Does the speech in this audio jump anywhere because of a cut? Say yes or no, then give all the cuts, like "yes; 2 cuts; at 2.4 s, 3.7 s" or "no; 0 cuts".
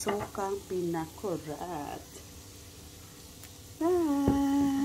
yes; 1 cut; at 3.7 s